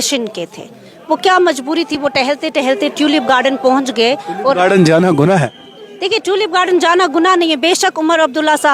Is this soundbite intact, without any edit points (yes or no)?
yes